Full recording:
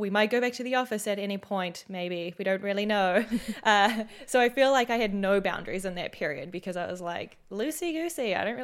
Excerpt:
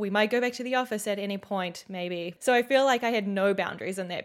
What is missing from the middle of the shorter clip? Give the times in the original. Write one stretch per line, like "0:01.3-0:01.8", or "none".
0:02.3-0:04.2